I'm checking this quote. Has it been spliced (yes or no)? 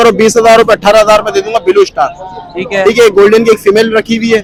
no